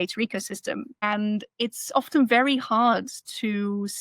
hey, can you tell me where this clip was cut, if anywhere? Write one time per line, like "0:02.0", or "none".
0:01.0

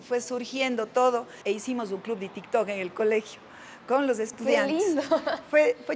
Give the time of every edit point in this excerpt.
0:01.3

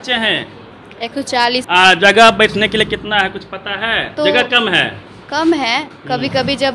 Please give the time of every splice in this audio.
0:01.6
0:04.1

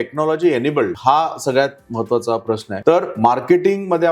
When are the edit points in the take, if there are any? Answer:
0:00.9
0:02.7

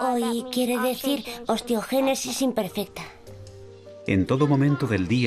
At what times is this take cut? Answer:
0:01.8

